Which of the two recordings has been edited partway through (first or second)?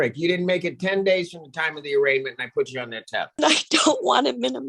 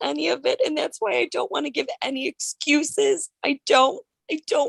first